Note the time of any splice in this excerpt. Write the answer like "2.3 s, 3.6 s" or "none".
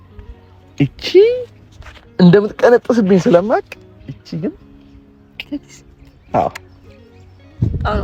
none

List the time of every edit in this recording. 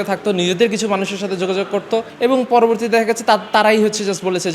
2.1 s

